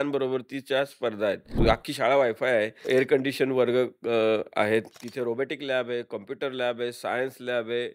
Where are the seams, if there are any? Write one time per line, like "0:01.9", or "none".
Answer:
0:01.5
0:02.8
0:05.0